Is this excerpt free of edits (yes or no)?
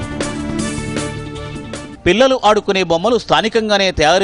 no